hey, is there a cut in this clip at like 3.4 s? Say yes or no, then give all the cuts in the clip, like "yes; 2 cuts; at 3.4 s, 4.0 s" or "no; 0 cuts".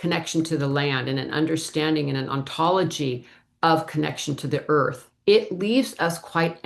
no; 1 cut; at 5.1 s